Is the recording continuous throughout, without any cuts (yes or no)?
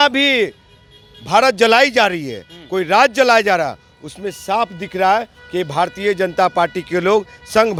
yes